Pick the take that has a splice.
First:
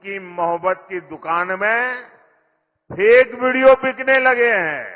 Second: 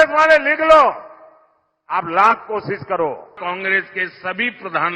second; 1 cut; at 3.3 s

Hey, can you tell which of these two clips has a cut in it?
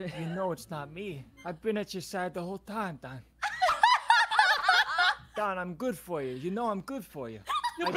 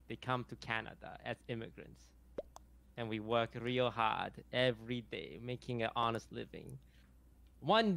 first; 2 cuts; at 1.3 s, 5.2 s

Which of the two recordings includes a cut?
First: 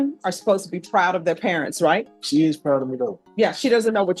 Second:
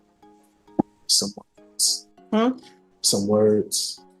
first; 2 cuts; at 2.2 s, 3.2 s

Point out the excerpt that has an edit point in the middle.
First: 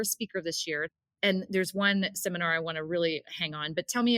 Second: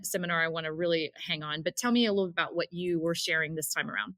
first; 1 cut; at 0.9 s

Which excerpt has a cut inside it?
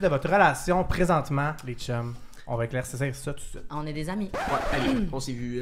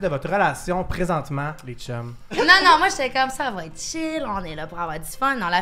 second; 1 cut; at 2.4 s

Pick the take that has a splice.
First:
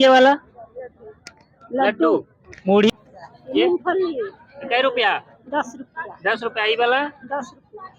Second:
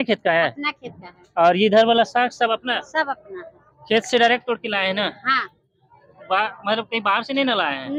first; 1 cut; at 2.9 s

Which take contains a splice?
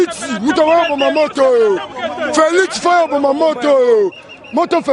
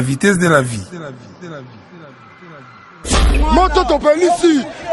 second; 1 cut; at 3.3 s

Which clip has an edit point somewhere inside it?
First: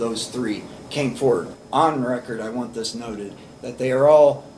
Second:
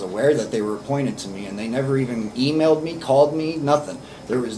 first; 1 cut; at 1.5 s

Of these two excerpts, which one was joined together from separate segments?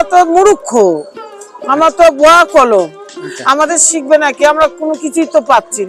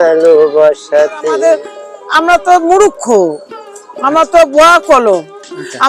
second; 1 cut; at 1.4 s

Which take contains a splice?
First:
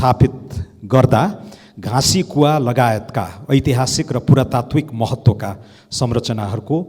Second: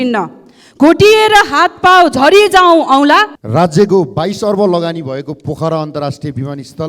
second; 1 cut; at 3.4 s

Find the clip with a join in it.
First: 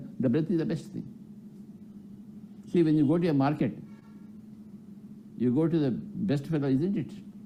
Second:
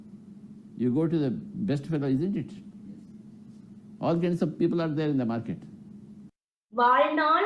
second; 1 cut; at 6.2 s

